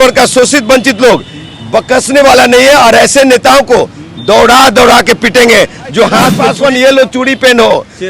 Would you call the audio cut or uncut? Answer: cut